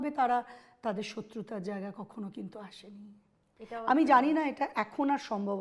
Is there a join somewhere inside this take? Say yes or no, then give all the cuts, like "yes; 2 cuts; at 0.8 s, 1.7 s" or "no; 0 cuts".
no; 0 cuts